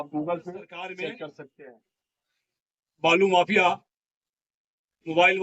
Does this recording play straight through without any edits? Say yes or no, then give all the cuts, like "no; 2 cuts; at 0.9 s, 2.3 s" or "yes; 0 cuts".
no; 1 cut; at 1.7 s